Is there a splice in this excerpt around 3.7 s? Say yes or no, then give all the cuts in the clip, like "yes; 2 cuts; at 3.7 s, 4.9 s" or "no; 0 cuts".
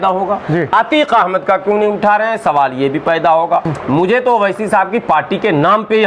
yes; 1 cut; at 3.7 s